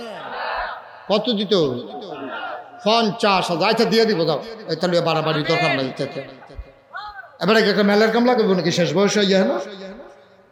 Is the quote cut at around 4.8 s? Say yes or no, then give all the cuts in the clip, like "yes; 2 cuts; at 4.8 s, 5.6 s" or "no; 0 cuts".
no; 0 cuts